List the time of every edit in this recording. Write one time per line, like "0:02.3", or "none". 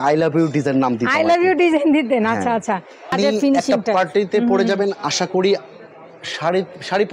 0:03.1